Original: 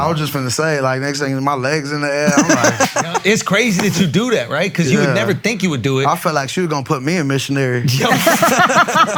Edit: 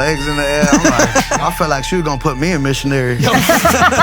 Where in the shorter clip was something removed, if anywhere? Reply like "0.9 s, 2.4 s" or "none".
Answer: 1.4 s, 3.2 s